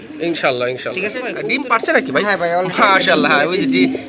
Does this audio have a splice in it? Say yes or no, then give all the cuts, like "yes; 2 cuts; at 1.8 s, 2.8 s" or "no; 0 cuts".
yes; 1 cut; at 1.4 s